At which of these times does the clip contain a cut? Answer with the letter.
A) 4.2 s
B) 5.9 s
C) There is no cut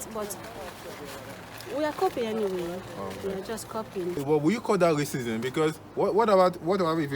A